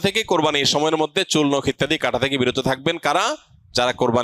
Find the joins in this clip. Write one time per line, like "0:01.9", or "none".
none